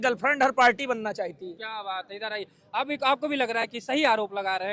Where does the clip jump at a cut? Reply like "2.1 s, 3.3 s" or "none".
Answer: none